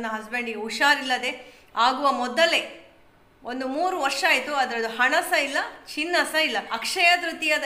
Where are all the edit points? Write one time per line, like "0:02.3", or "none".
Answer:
0:06.7